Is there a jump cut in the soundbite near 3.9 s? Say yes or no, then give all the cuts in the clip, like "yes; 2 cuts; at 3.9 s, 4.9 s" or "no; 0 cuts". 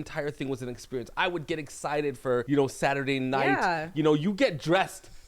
no; 1 cut; at 2.4 s